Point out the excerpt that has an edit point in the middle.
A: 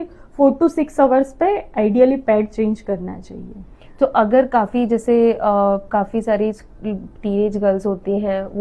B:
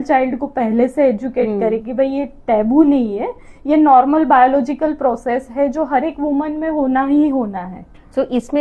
B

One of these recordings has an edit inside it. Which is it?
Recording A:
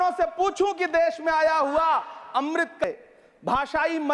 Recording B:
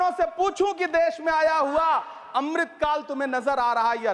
A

